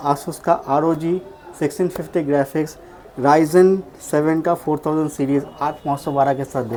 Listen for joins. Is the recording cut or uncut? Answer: uncut